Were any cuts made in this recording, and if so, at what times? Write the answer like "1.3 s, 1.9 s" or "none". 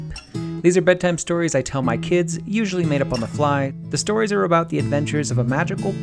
3.8 s